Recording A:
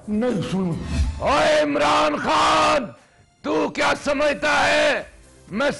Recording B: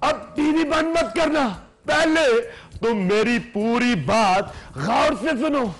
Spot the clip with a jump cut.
A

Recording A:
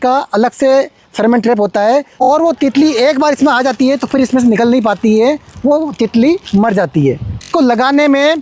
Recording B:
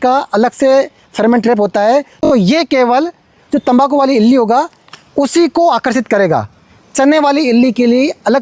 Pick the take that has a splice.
A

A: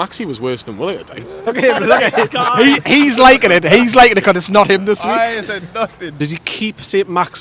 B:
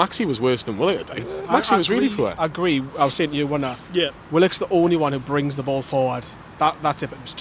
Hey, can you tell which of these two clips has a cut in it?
A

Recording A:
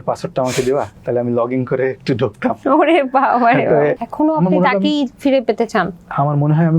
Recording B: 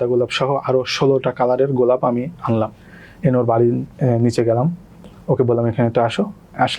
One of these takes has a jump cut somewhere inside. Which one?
A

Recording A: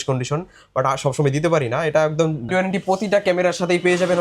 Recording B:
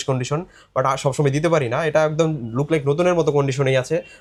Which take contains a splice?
A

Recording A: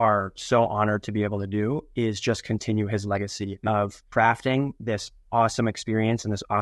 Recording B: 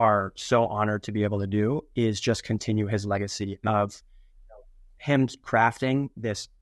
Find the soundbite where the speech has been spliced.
A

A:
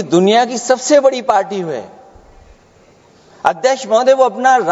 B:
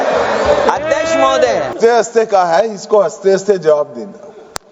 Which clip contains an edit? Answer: B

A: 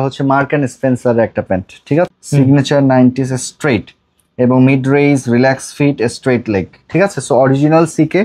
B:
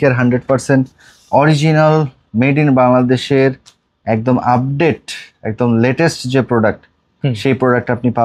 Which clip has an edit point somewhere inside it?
A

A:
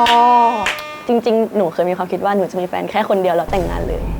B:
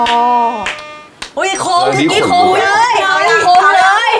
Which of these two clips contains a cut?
A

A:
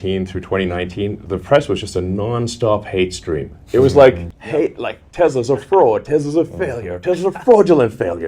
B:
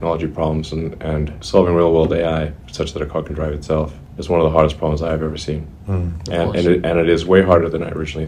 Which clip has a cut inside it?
A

